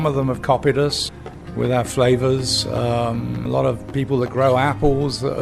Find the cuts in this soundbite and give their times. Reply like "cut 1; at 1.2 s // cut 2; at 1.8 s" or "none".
cut 1; at 1.0 s // cut 2; at 3.4 s